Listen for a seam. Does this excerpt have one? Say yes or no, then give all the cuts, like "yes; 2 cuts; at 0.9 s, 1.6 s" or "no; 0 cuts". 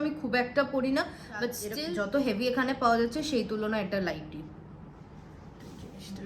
yes; 1 cut; at 1.7 s